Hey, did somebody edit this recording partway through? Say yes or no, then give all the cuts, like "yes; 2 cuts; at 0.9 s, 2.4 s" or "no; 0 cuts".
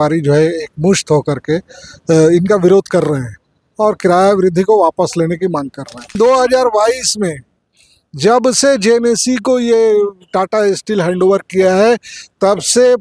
yes; 1 cut; at 6.1 s